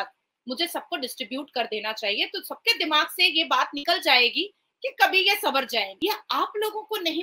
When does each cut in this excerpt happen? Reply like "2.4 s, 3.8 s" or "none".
5.9 s